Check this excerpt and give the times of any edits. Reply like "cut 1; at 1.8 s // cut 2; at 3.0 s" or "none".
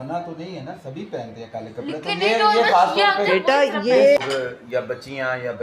cut 1; at 4.2 s